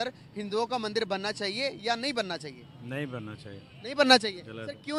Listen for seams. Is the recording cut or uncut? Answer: uncut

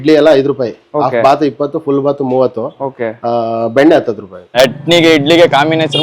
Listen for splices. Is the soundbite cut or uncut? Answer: cut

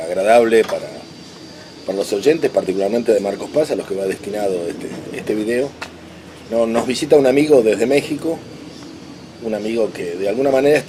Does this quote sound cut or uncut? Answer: uncut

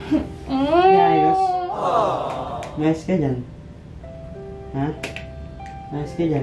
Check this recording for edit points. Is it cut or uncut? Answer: cut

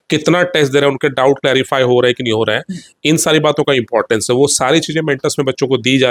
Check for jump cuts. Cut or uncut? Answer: uncut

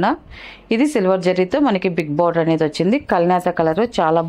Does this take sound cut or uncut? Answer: uncut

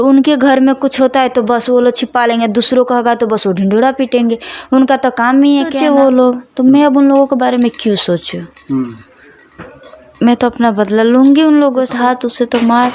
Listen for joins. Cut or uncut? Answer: cut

